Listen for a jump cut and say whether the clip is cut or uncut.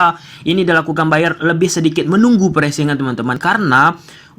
cut